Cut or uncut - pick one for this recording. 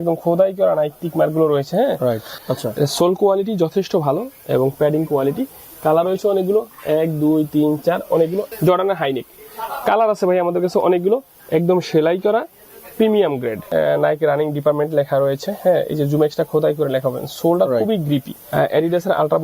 cut